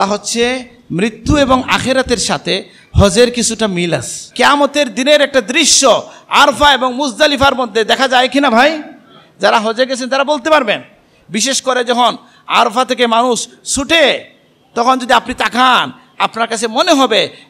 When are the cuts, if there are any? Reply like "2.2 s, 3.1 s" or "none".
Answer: 4.2 s